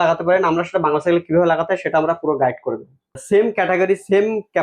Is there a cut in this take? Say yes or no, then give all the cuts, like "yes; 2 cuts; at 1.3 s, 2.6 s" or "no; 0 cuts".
yes; 1 cut; at 3.1 s